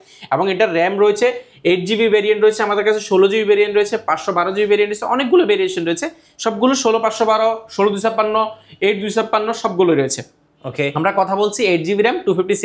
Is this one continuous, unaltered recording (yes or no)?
yes